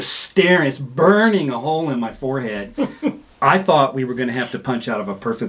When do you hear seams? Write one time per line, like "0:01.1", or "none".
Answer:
none